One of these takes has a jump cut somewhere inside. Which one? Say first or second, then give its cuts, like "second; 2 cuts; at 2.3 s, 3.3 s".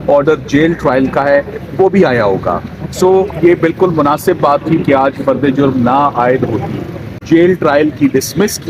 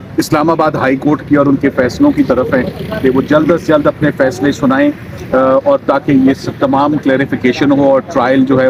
first; 1 cut; at 7.1 s